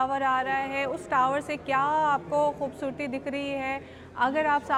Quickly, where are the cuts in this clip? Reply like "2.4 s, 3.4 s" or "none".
none